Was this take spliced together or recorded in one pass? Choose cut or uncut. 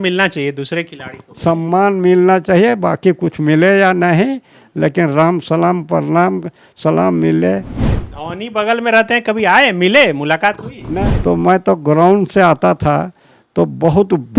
cut